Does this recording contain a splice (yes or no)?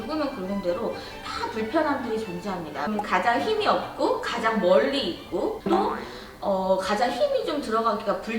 yes